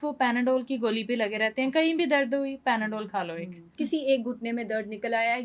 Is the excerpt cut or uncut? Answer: cut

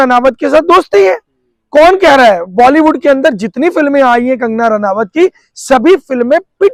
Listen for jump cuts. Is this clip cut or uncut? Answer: uncut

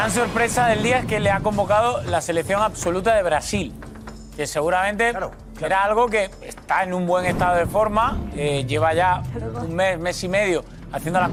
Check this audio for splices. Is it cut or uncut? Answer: uncut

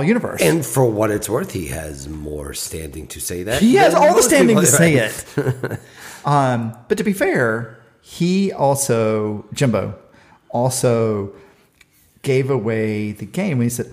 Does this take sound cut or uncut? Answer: uncut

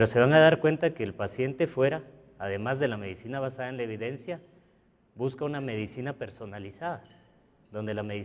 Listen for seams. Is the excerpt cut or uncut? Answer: uncut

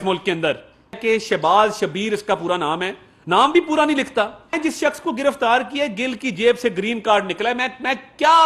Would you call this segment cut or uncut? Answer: cut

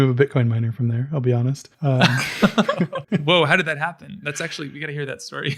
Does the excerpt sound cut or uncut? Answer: cut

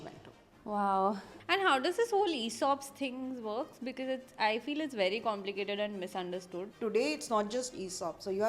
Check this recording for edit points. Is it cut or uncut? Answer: cut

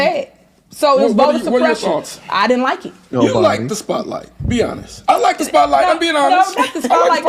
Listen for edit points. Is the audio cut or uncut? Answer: cut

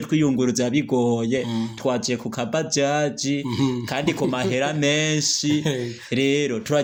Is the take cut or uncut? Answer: uncut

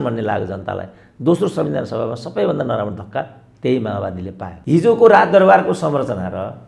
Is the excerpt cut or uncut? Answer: cut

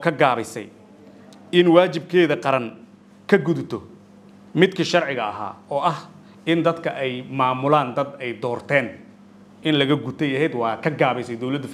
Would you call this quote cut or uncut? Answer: uncut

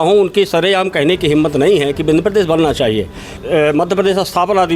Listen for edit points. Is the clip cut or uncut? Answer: cut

